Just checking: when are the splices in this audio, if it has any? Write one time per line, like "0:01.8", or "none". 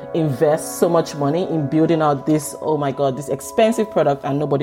none